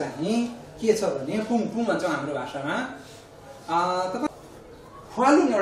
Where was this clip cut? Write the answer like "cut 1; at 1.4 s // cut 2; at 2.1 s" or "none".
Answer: cut 1; at 4.2 s